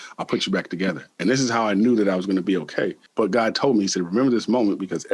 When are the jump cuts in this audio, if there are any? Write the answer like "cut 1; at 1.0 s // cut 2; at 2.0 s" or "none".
cut 1; at 3.0 s